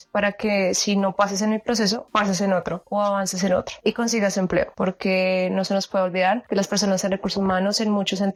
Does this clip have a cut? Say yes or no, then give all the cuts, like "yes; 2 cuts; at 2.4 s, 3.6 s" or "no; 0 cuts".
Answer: no; 0 cuts